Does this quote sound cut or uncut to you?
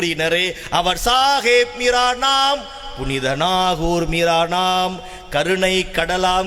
uncut